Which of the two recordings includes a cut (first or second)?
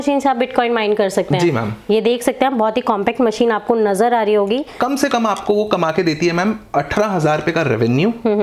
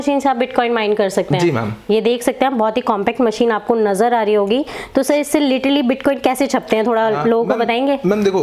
first